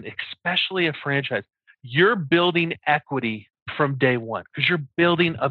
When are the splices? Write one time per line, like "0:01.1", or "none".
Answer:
none